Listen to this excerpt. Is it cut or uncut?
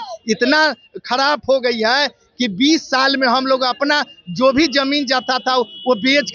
uncut